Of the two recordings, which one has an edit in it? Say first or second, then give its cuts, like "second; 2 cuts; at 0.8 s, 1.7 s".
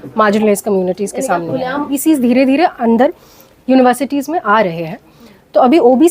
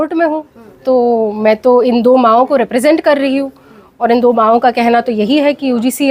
first; 1 cut; at 2.0 s